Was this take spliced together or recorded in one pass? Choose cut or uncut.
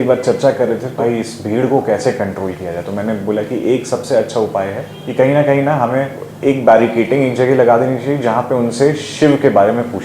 cut